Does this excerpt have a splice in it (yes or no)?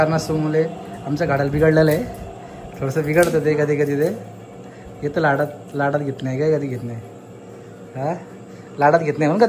no